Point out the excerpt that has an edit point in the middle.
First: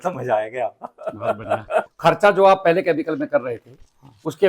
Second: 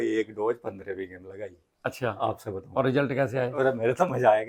first; 1 cut; at 1.9 s

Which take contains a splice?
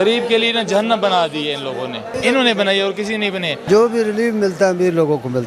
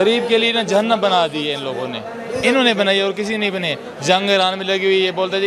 first; 2 cuts; at 2.0 s, 3.6 s

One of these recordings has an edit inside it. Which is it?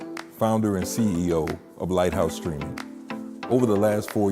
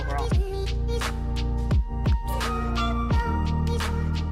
first; 1 cut; at 2.5 s

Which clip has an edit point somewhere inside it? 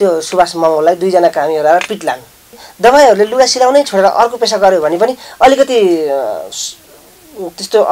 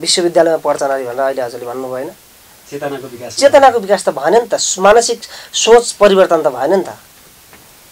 first; 1 cut; at 2.7 s

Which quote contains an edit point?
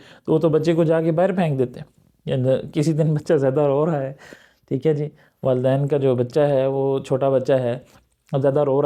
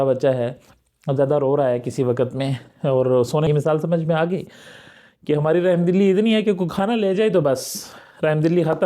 second; 1 cut; at 3.5 s

